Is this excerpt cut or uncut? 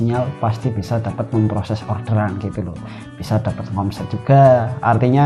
uncut